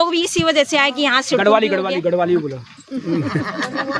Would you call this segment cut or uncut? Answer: uncut